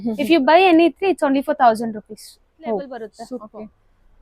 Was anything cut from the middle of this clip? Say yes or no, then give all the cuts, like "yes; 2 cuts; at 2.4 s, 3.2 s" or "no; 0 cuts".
yes; 1 cut; at 3.3 s